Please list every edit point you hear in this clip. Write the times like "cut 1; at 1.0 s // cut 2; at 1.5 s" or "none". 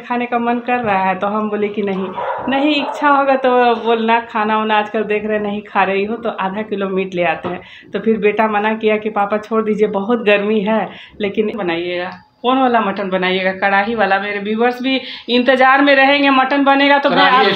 cut 1; at 11.6 s